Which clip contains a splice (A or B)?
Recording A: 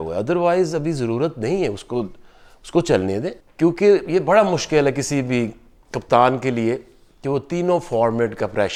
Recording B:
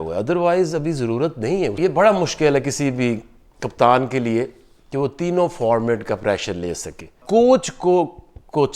B